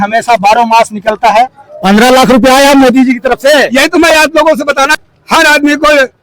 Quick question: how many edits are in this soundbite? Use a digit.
2